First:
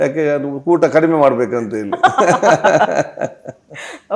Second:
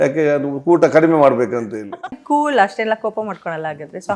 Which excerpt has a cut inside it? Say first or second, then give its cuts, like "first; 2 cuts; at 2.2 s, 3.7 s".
second; 1 cut; at 2.0 s